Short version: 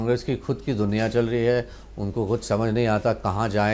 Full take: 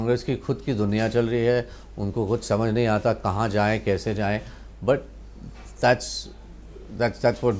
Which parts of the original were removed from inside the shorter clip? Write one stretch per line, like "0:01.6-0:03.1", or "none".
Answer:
none